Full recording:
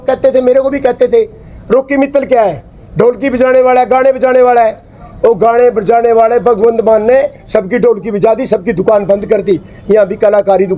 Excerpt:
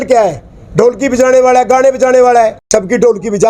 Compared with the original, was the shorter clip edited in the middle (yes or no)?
yes